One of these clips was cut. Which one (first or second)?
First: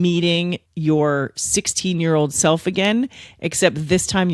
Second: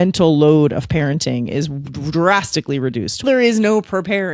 second